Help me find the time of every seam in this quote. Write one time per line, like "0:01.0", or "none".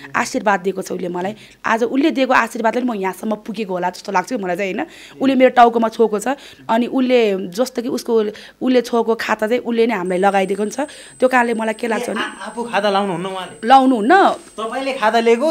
none